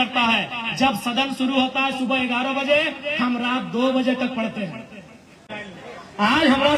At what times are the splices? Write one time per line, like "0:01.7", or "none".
0:05.6